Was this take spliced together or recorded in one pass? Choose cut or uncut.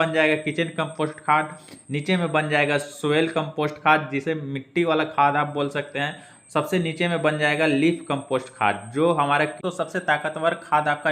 cut